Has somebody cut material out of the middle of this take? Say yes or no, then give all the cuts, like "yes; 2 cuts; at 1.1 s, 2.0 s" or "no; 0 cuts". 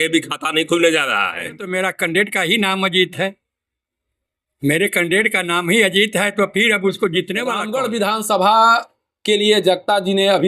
yes; 2 cuts; at 1.7 s, 7.6 s